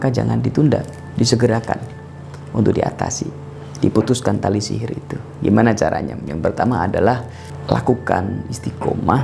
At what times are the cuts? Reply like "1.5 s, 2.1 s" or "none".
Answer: none